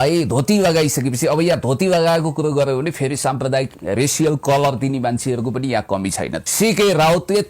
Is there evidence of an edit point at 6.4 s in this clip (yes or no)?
yes